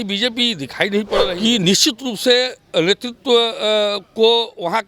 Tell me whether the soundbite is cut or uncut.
cut